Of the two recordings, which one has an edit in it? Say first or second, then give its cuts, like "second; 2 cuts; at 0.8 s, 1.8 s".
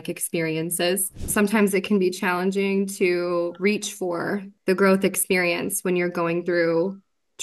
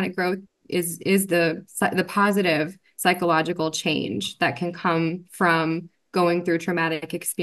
first; 2 cuts; at 1.3 s, 4.5 s